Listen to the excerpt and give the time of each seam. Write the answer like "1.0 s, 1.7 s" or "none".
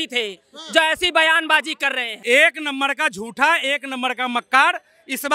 2.1 s